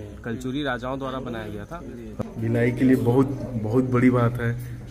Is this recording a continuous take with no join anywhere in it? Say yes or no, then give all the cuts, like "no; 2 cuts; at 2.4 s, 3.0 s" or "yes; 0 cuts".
no; 1 cut; at 2.1 s